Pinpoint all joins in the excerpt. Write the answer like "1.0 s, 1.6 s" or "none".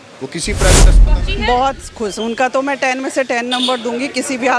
1.0 s